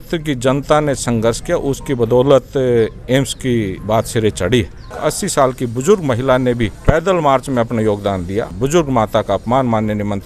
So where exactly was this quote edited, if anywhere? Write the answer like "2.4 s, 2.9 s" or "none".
3.8 s, 4.9 s, 6.7 s, 8.5 s